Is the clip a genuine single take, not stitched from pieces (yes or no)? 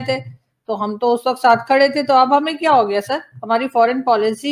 yes